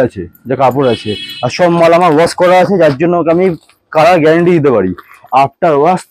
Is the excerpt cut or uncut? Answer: cut